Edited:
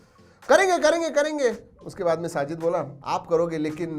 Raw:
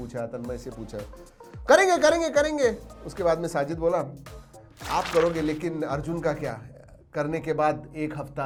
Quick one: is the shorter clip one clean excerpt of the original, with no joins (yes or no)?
no